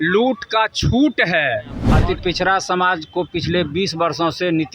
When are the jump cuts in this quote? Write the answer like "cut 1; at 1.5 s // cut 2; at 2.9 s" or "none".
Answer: cut 1; at 1.8 s